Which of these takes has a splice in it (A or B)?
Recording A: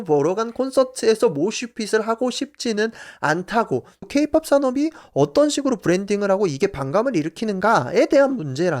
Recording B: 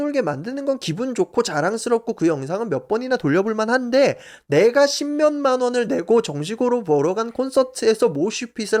A